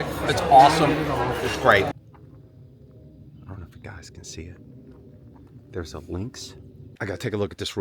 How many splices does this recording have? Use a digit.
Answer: 2